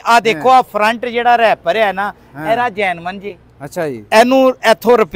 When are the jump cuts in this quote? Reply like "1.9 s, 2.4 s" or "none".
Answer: none